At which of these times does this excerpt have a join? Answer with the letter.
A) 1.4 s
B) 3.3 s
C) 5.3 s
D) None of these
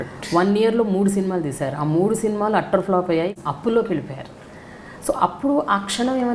B